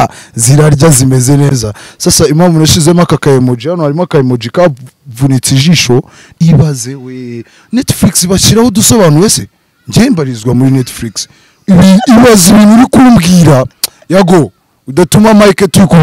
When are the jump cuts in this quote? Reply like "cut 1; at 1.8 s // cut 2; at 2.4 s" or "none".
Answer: cut 1; at 6.2 s